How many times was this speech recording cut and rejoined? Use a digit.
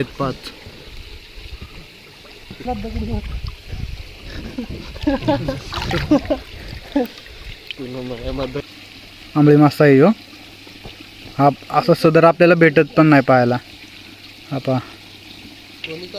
1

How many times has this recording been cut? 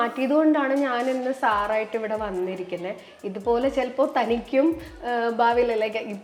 0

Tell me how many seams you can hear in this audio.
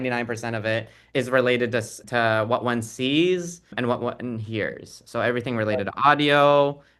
3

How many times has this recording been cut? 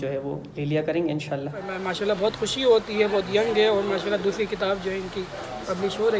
1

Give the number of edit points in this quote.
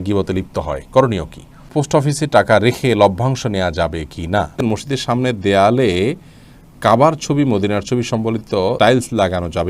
3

